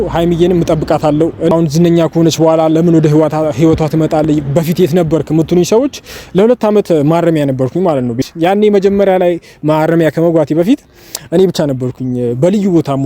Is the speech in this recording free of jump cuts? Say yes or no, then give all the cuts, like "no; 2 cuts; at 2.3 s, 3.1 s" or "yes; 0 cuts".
no; 2 cuts; at 1.5 s, 8.2 s